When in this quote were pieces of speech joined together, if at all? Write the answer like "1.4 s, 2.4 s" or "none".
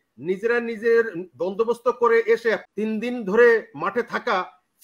2.6 s